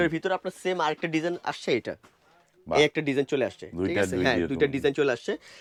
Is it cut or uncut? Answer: uncut